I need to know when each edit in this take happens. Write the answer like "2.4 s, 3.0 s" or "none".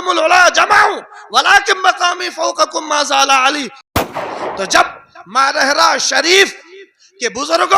4.2 s